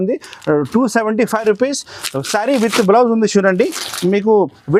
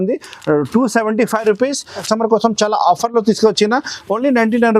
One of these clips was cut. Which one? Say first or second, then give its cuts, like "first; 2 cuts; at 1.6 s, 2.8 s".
second; 1 cut; at 2.1 s